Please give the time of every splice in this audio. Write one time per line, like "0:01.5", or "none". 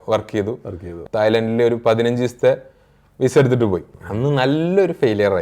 0:00.9
0:04.0